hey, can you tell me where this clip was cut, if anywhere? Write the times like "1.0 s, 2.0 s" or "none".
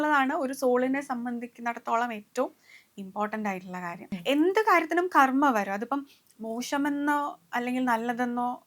4.0 s